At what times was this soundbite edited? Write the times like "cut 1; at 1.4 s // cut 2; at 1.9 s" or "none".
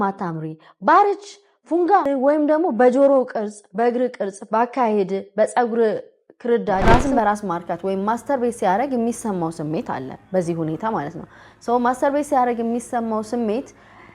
cut 1; at 2.1 s // cut 2; at 6.8 s